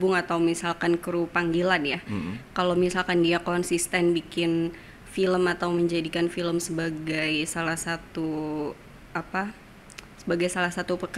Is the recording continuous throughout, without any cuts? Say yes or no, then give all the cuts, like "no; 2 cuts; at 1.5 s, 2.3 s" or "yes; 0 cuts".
yes; 0 cuts